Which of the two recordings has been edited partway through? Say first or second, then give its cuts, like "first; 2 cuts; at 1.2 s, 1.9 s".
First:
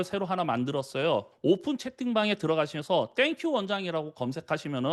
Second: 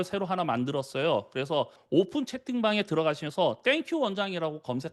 first; 1 cut; at 1.3 s